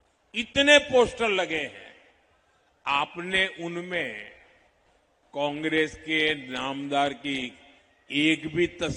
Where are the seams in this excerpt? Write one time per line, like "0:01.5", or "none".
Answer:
none